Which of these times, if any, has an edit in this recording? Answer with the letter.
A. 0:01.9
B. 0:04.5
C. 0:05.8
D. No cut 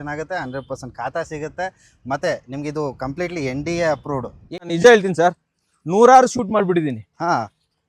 B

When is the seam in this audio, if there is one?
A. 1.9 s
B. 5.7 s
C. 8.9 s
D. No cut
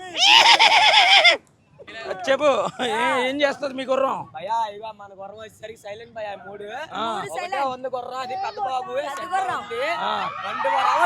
A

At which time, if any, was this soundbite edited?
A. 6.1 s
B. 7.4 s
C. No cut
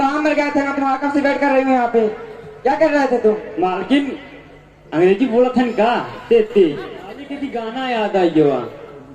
B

